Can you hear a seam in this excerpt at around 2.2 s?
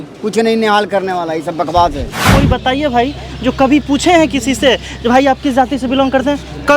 yes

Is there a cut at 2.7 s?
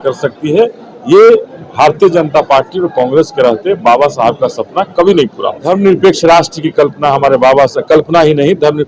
no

